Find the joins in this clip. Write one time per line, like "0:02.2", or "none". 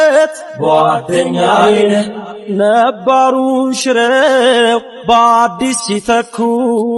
none